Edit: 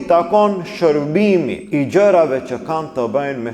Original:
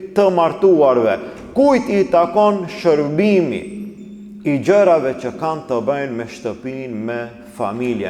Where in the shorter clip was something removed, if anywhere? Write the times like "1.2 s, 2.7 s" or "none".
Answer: 1.6 s